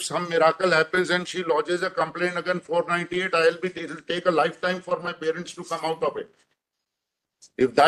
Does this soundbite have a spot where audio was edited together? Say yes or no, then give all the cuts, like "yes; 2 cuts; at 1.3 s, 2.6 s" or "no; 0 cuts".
no; 0 cuts